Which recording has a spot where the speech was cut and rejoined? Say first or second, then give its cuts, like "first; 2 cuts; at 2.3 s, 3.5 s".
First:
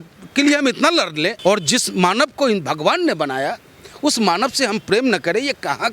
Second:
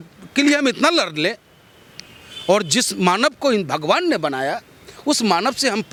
first; 1 cut; at 1.4 s